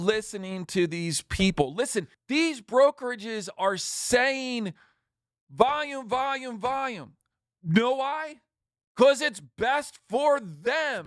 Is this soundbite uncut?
no; 1 cut; at 2.2 s

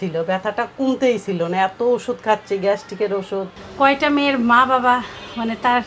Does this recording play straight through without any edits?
no; 1 cut; at 3.6 s

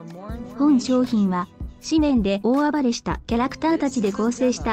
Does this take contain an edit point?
no; 0 cuts

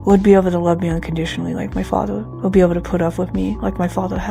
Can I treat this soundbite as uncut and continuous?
yes; 0 cuts

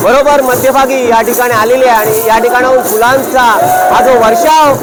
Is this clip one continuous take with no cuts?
yes; 0 cuts

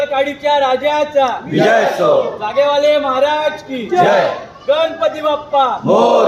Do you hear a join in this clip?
no; 0 cuts

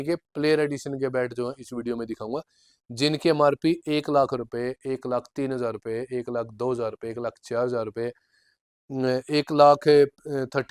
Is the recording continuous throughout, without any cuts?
yes; 0 cuts

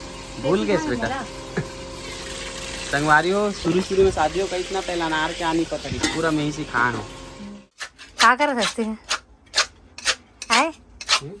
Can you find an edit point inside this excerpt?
yes; 1 cut; at 7.5 s

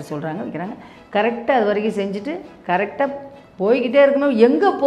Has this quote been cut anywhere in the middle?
no; 0 cuts

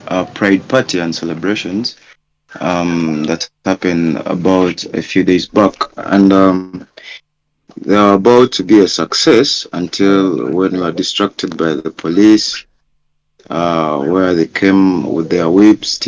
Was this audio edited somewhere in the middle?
no; 0 cuts

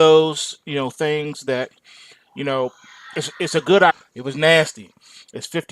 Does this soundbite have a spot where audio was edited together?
no; 0 cuts

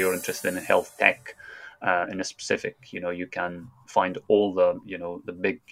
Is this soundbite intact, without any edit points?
yes; 0 cuts

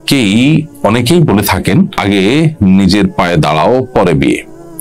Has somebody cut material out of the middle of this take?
yes; 1 cut; at 2.0 s

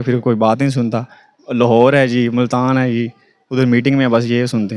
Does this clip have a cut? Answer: no; 0 cuts

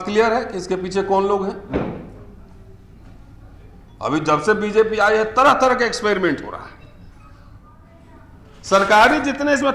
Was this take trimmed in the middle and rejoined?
yes; 1 cut; at 7.8 s

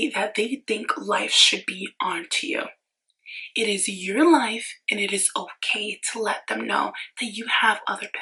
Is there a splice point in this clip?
no; 0 cuts

